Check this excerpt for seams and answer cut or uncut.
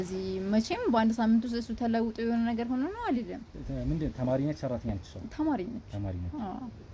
uncut